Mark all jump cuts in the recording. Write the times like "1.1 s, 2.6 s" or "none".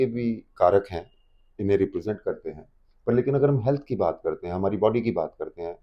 none